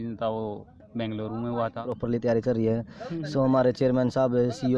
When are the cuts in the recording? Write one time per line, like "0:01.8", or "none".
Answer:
0:01.9